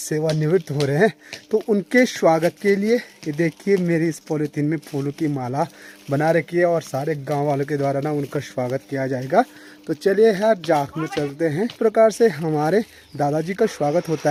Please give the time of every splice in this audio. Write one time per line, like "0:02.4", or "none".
none